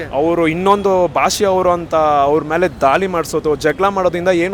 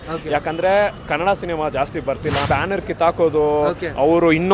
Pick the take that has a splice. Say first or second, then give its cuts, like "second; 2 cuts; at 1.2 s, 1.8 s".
second; 1 cut; at 2.4 s